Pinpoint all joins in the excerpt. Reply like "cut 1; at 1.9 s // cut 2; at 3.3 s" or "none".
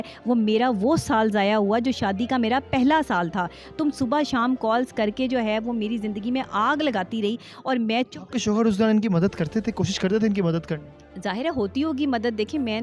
none